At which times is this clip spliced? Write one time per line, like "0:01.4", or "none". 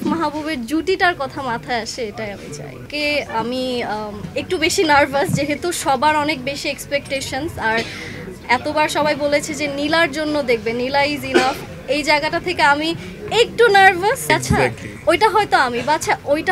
0:02.8
0:14.2

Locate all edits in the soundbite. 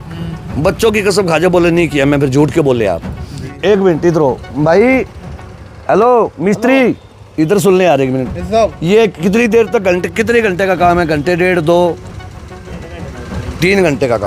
0:03.5

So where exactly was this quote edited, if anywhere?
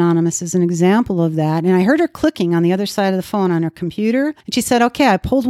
0:04.4

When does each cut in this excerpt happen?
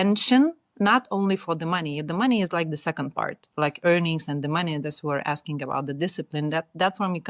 none

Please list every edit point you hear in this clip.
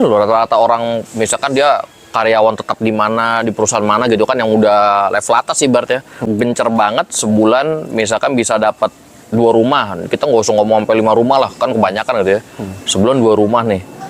0:06.2

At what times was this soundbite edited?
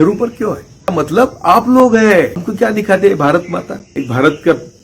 0:00.9
0:02.4
0:03.8

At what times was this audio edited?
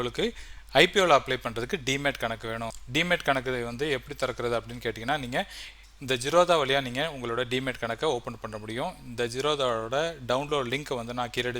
0:02.8

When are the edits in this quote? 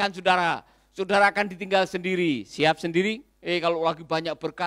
0:03.3

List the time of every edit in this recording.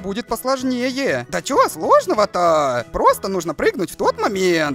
0:01.4
0:02.9

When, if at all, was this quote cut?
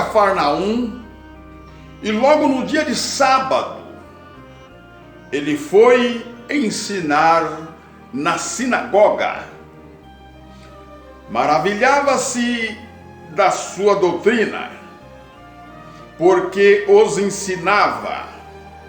0:09.8
0:11.3

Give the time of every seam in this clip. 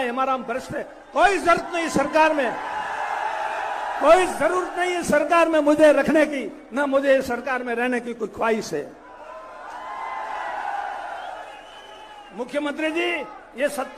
none

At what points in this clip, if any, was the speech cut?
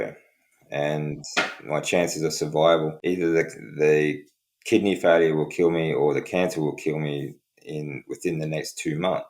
0:02.9

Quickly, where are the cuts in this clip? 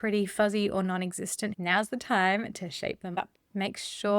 0:01.6

